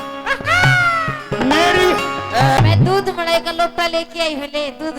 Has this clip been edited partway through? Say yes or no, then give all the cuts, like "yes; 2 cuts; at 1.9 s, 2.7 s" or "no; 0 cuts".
yes; 1 cut; at 2.6 s